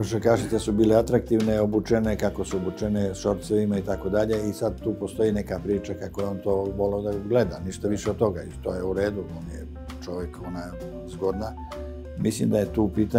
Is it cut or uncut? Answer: uncut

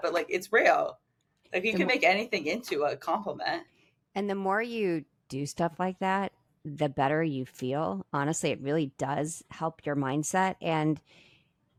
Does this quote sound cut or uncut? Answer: uncut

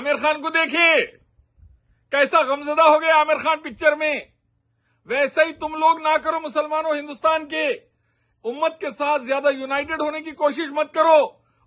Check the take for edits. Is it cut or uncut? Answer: uncut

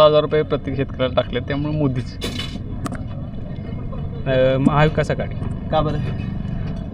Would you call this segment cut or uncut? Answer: uncut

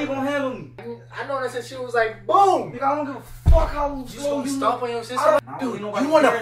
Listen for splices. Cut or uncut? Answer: cut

